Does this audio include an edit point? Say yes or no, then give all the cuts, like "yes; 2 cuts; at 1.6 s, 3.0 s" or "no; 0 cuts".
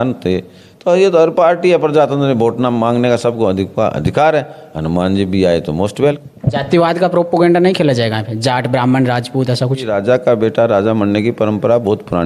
yes; 2 cuts; at 6.3 s, 9.9 s